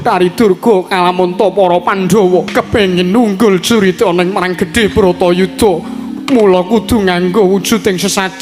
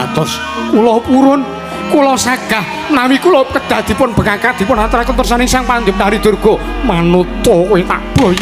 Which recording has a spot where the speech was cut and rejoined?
first; 1 cut; at 2.5 s

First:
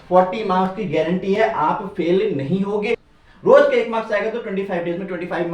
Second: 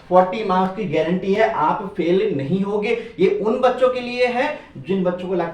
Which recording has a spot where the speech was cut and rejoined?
first; 1 cut; at 3.1 s

